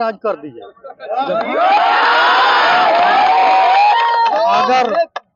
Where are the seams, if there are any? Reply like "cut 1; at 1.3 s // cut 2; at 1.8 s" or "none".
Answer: none